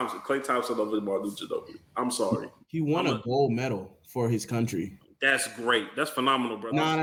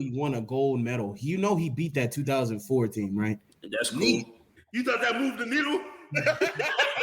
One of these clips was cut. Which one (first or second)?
second